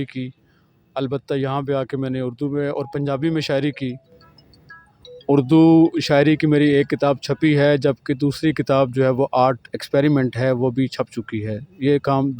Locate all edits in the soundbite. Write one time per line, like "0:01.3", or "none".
none